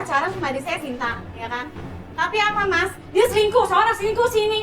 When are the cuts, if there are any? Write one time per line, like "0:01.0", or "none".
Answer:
0:03.0